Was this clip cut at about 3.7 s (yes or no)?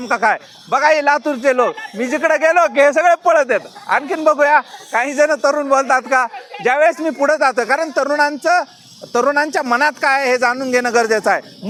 no